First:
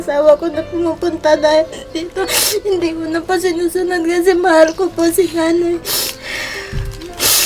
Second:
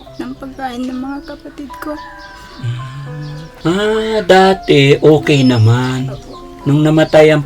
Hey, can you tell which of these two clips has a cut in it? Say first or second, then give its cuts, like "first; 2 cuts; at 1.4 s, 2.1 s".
second; 1 cut; at 3.4 s